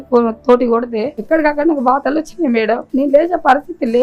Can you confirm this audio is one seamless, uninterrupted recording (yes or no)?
no